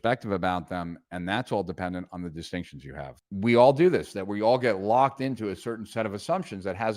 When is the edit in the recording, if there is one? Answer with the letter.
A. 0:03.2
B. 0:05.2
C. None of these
A